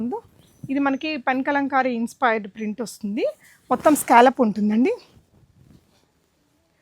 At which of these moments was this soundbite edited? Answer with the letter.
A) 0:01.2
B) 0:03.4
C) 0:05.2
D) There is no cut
D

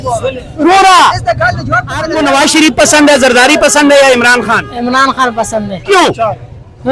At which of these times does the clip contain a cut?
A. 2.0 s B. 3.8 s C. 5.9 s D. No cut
A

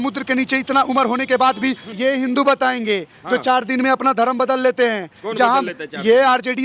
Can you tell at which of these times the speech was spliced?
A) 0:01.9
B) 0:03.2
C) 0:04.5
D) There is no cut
A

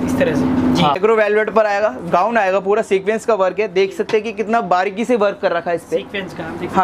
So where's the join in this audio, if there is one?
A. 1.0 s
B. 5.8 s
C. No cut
A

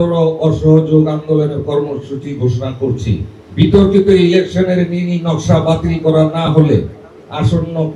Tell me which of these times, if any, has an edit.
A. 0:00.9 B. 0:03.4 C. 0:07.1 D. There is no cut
B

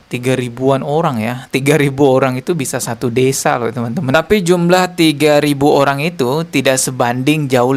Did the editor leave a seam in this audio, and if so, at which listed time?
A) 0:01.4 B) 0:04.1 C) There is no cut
B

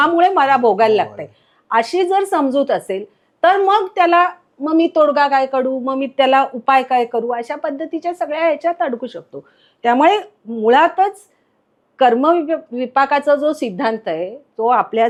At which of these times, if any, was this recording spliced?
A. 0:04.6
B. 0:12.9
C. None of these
C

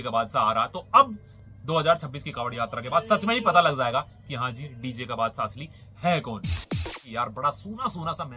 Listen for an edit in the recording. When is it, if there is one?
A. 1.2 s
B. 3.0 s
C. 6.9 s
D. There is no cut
C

